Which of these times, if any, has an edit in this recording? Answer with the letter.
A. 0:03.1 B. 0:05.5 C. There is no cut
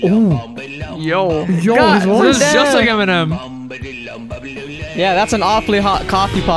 C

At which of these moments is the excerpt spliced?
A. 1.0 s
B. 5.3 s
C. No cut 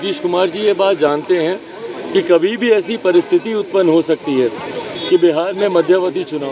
C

